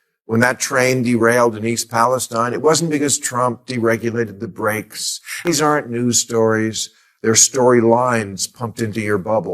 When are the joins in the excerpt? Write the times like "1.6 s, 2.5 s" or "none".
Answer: 5.3 s

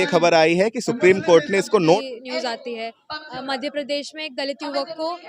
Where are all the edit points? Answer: 2.0 s

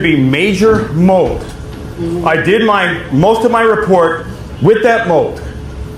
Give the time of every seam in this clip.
none

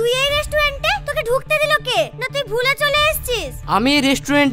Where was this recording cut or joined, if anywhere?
none

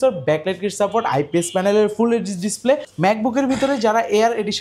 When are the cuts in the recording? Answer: 2.9 s

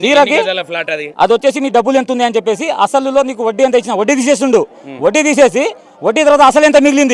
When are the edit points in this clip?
1.0 s

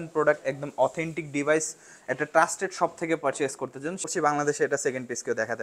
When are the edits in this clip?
4.0 s

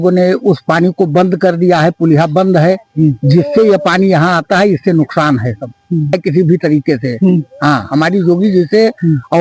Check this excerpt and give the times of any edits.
6.2 s

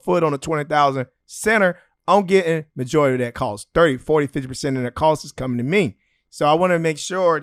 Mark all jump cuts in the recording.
none

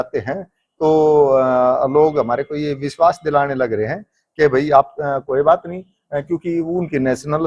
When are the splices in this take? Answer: none

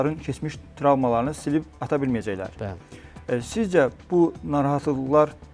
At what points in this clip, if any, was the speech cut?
none

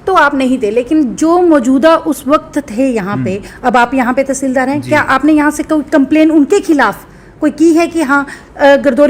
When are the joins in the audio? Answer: none

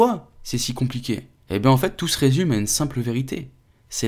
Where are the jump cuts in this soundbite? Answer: 1.3 s

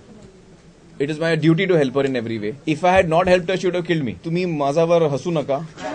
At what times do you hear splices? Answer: 2.5 s, 4.2 s

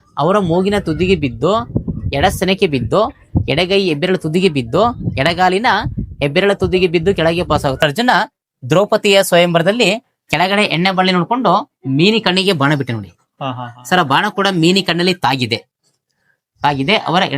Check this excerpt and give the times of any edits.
7.8 s

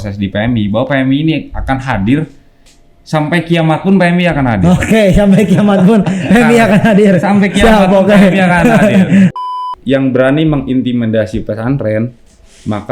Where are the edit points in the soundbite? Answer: 9.3 s

